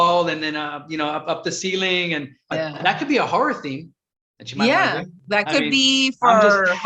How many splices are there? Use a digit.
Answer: 1